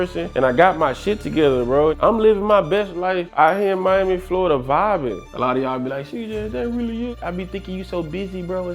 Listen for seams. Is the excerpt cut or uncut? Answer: cut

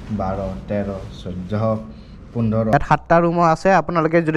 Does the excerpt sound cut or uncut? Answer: cut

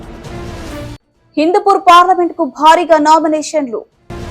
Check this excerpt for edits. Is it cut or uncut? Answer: cut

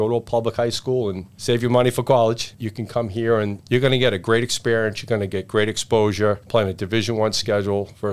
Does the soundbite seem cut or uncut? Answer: cut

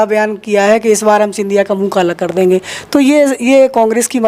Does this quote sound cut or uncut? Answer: uncut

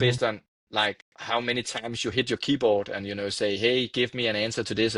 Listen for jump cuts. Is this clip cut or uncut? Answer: uncut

